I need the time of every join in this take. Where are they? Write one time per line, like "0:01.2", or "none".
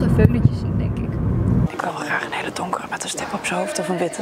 0:01.7